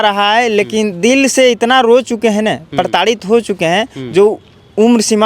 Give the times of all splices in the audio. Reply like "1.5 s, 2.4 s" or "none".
none

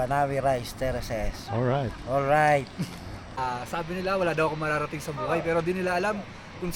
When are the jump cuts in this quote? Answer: 3.2 s

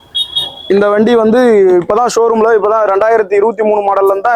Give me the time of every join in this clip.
none

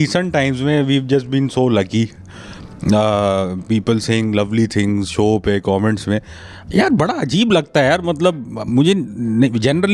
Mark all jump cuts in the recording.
none

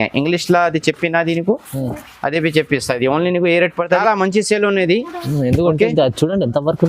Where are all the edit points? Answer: 4.0 s

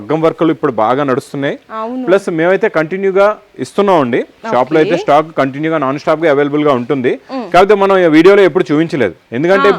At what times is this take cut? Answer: none

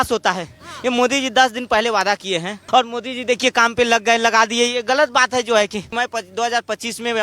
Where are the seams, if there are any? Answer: 2.5 s, 5.9 s

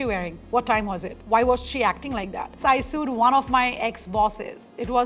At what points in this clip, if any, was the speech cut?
2.6 s

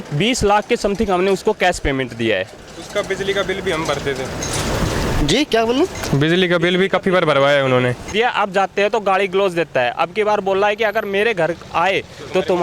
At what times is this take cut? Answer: 8.1 s

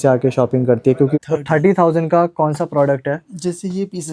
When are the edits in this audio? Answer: 1.2 s

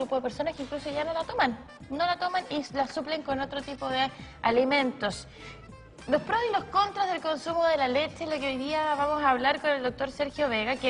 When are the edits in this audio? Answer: 8.7 s

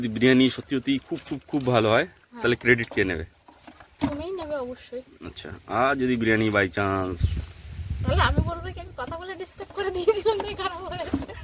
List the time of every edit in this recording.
none

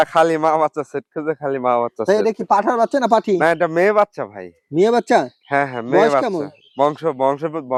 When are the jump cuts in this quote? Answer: none

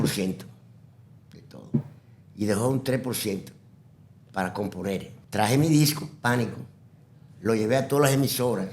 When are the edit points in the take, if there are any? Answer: 5.1 s

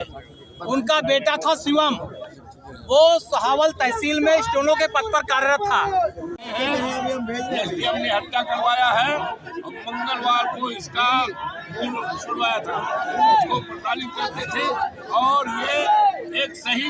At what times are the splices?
6.4 s

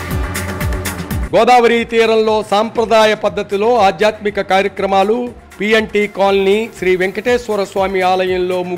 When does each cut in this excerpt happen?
none

